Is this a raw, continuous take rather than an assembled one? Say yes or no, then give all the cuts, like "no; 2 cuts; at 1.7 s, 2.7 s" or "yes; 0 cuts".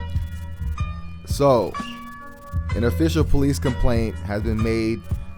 no; 1 cut; at 1.1 s